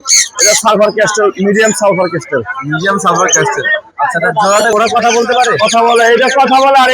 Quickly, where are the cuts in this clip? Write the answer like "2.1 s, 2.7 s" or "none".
4.7 s